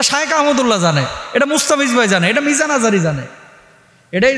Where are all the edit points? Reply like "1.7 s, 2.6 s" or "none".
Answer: none